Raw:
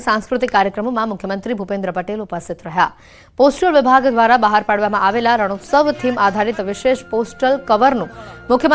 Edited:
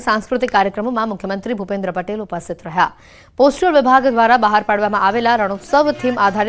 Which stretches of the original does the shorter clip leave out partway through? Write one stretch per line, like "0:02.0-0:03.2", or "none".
none